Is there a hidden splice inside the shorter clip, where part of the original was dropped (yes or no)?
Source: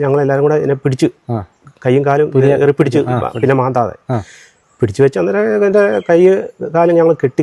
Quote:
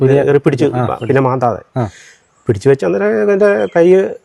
no